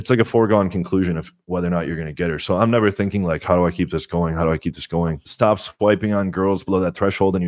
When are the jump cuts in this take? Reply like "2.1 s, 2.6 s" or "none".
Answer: 5.2 s